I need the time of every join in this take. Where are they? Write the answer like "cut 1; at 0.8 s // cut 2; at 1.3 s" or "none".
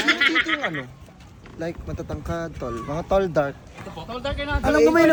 none